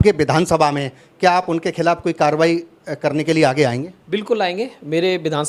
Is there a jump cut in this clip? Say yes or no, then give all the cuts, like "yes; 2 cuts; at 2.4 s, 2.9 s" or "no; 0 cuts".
no; 0 cuts